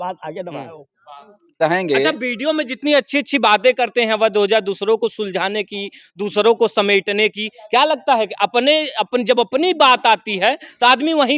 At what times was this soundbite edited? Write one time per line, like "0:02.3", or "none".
0:01.6